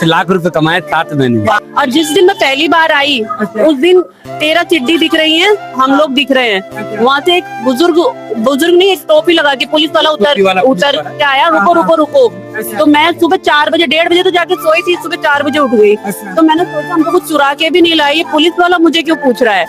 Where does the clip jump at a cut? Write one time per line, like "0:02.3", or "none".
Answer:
0:01.6